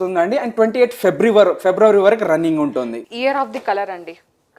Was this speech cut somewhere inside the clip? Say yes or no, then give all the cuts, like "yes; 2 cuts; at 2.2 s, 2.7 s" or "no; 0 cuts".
yes; 1 cut; at 3.0 s